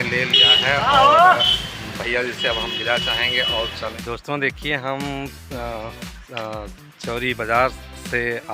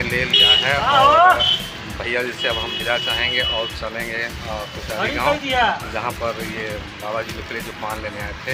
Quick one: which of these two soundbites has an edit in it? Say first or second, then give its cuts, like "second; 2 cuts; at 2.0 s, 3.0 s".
first; 1 cut; at 4.0 s